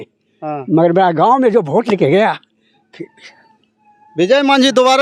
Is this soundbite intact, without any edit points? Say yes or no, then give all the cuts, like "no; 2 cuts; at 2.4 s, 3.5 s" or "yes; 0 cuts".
yes; 0 cuts